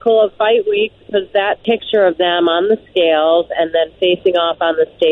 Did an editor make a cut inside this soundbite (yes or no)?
yes